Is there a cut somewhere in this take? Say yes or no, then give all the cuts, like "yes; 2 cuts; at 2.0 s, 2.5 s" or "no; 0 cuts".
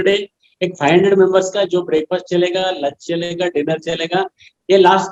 no; 0 cuts